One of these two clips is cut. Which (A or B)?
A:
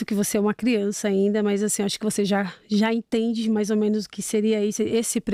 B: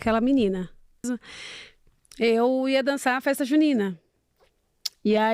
B